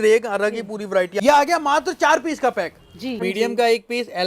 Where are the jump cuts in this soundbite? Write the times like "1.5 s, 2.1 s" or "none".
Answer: 1.1 s, 3.1 s